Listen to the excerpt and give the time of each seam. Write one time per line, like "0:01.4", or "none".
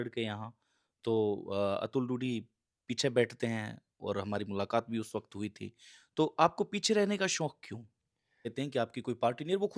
0:08.5